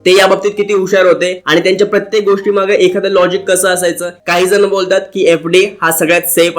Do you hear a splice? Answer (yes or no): yes